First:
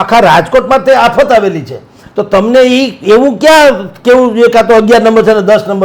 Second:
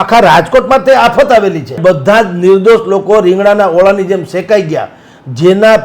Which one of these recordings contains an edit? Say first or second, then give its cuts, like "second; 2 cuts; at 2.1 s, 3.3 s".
second; 1 cut; at 1.8 s